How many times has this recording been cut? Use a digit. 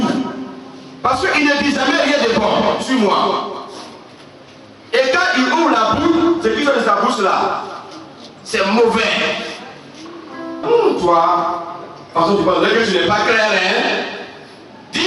1